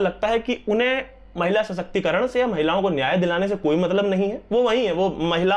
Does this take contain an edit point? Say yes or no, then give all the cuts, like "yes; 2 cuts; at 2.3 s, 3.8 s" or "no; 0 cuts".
no; 0 cuts